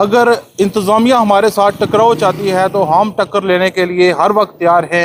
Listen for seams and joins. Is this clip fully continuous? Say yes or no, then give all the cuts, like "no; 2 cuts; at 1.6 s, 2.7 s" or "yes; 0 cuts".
yes; 0 cuts